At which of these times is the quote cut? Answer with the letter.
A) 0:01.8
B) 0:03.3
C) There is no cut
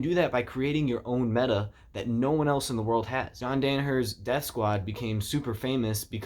B